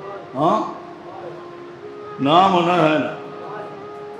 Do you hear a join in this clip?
no; 0 cuts

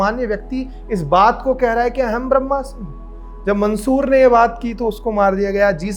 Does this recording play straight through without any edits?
yes; 0 cuts

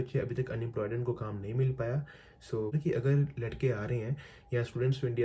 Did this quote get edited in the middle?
yes; 1 cut; at 2.7 s

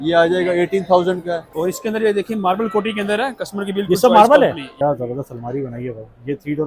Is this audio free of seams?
no; 2 cuts; at 1.5 s, 4.7 s

